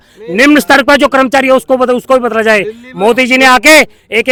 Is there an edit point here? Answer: no; 0 cuts

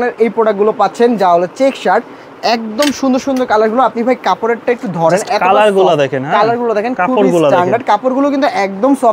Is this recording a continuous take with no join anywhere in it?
yes; 0 cuts

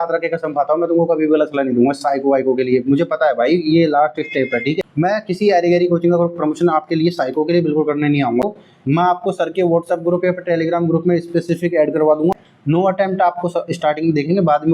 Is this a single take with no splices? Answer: no; 3 cuts; at 4.8 s, 8.4 s, 12.3 s

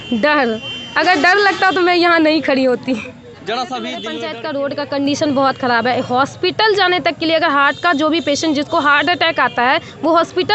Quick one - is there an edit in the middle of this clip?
yes; 1 cut; at 4.2 s

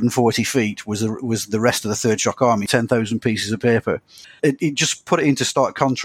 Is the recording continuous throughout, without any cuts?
no; 2 cuts; at 2.6 s, 4.4 s

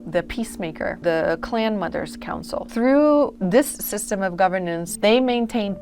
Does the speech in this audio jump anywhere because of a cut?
yes; 4 cuts; at 1.0 s, 2.7 s, 3.3 s, 4.9 s

